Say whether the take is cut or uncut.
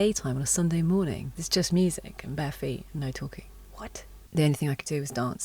cut